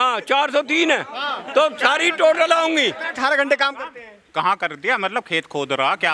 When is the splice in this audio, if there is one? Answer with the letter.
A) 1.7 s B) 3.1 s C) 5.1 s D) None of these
B